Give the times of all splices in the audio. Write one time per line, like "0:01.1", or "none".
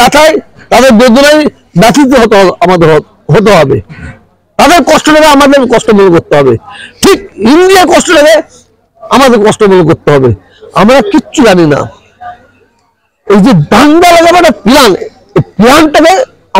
none